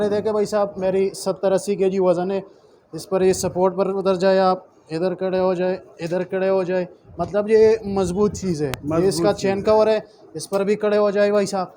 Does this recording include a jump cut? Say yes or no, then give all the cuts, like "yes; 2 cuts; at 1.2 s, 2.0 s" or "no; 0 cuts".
no; 0 cuts